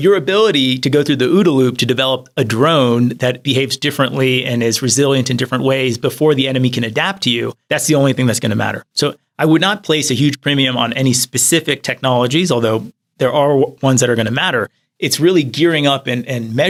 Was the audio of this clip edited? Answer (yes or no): no